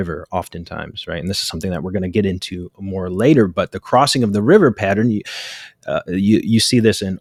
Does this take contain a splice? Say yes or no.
no